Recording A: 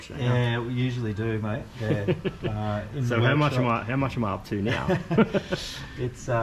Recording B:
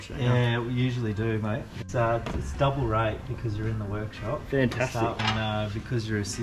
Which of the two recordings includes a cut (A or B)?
B